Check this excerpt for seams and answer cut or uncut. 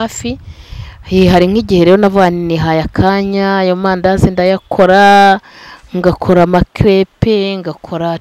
uncut